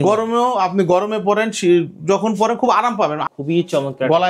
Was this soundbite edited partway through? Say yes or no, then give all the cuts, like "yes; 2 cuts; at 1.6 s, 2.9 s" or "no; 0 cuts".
yes; 1 cut; at 3.2 s